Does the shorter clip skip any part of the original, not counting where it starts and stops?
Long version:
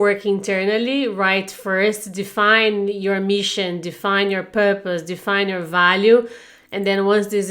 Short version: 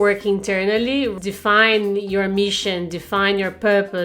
yes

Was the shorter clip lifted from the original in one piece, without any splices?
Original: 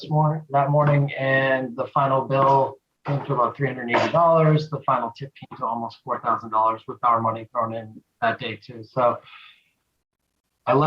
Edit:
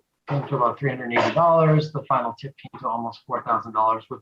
yes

